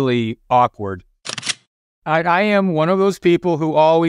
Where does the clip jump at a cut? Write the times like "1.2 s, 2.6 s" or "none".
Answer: 1.5 s